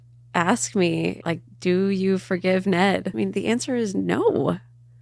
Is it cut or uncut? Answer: cut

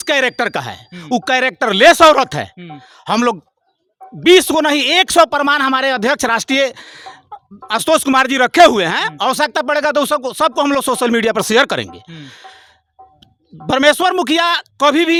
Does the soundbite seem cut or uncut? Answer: uncut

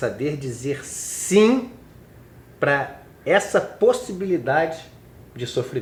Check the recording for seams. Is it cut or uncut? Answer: uncut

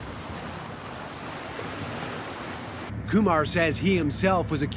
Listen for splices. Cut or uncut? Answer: uncut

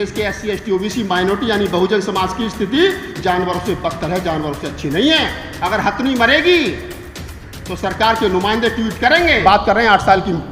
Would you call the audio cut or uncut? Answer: cut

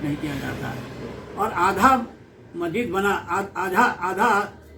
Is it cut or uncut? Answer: uncut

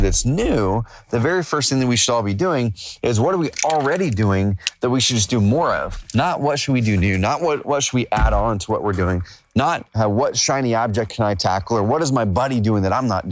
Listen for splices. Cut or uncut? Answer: cut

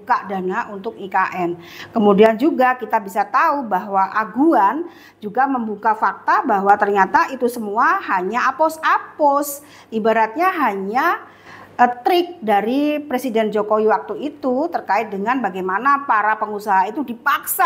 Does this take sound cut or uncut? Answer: uncut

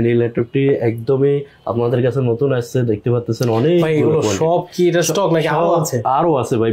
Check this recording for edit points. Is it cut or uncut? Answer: uncut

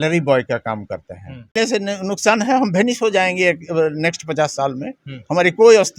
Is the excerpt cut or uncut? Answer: cut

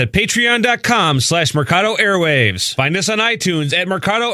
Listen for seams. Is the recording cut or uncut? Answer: uncut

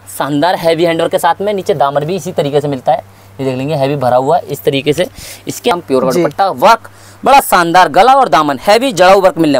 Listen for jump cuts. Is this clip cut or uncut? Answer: cut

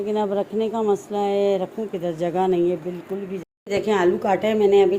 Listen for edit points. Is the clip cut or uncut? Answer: cut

